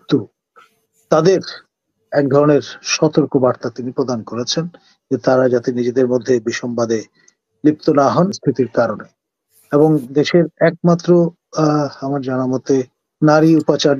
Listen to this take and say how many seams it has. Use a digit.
1